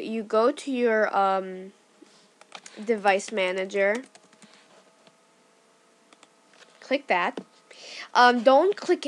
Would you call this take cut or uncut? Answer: uncut